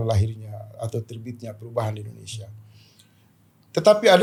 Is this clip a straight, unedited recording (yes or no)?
yes